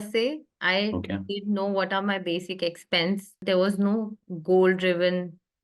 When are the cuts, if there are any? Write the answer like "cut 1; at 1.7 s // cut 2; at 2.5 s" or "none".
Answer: cut 1; at 3.3 s